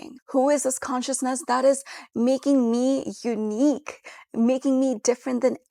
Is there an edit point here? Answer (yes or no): no